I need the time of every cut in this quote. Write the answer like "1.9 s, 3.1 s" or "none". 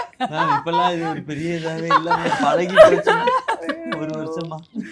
none